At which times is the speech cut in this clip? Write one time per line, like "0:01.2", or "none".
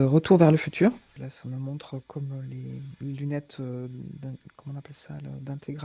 0:01.1